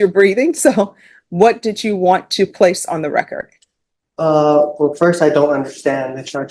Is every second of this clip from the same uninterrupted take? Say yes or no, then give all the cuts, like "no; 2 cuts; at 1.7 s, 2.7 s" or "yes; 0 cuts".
yes; 0 cuts